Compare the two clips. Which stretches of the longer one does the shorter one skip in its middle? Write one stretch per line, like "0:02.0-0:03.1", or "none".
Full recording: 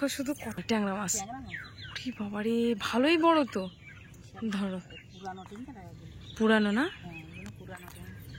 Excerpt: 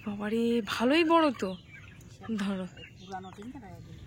none